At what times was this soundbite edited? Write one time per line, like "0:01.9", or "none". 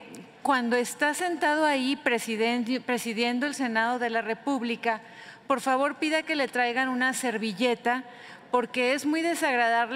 none